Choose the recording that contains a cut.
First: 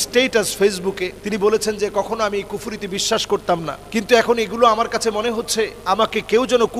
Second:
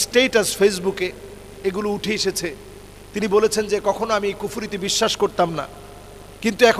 first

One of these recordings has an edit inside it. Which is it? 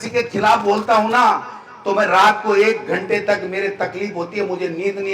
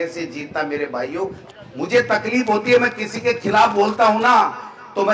second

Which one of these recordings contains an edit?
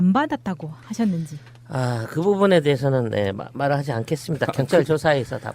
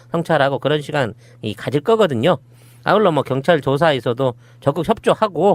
first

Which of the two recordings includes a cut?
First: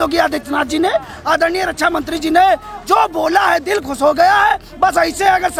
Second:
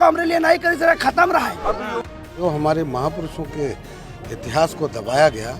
second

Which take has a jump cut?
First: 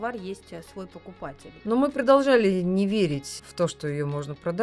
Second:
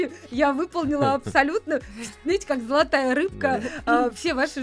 first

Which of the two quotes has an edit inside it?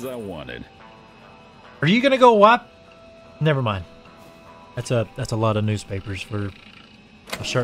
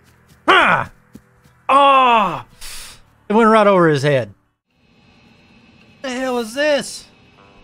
second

